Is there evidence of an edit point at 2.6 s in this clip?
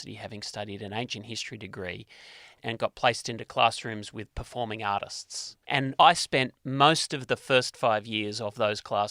yes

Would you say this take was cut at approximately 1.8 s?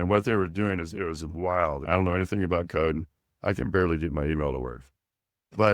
yes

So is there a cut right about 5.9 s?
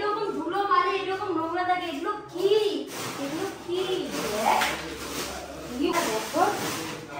yes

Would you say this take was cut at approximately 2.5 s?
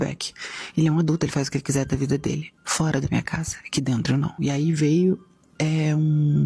no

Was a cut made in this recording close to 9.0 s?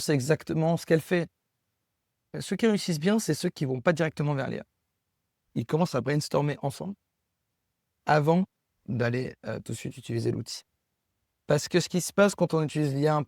no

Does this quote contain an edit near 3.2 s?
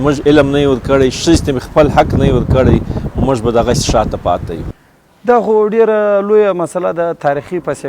no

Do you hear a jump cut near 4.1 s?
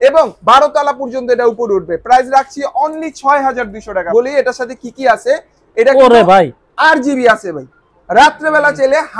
yes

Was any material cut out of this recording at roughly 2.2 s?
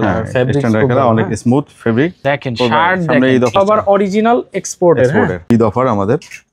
yes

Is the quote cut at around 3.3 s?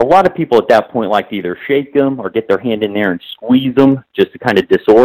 no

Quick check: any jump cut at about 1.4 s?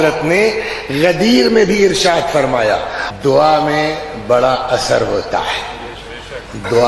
no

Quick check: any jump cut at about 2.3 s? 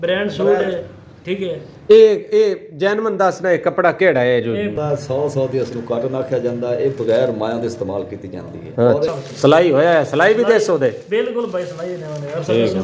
no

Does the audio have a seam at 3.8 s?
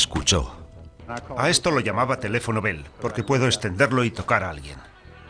yes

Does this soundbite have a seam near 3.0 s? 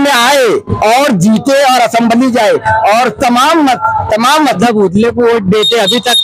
no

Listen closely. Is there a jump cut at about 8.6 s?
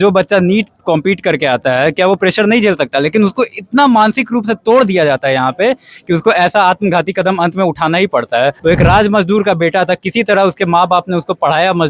yes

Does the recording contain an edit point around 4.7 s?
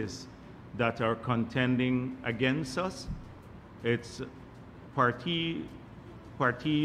no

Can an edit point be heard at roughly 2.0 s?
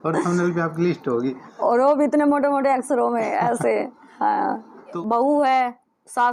no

